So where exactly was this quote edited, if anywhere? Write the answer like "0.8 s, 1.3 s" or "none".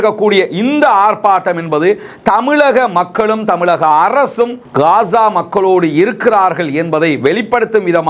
none